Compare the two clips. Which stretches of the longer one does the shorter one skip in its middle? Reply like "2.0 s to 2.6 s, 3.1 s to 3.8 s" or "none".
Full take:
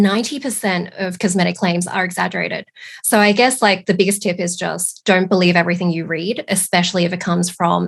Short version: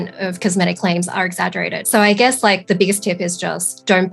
2.6 s to 3.0 s